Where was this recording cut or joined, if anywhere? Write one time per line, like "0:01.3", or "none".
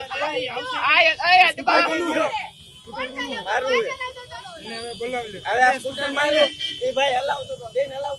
none